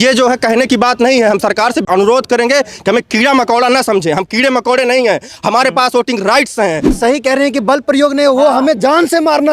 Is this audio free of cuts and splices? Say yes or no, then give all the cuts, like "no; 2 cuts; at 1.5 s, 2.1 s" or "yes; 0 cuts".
no; 2 cuts; at 1.8 s, 6.9 s